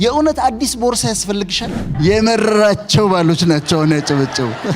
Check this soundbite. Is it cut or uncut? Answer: cut